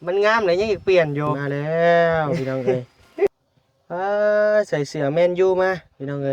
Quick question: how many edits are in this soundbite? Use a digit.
3